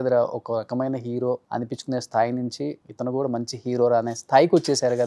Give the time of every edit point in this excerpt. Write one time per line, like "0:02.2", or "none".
0:01.4
0:02.8